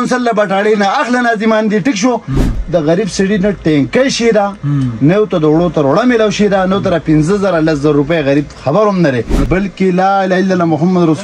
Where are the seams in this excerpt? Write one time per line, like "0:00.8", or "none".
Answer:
0:02.4
0:09.4